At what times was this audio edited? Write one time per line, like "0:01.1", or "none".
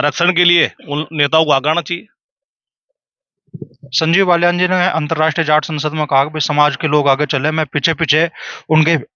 none